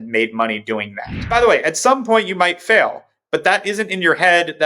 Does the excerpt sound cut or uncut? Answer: cut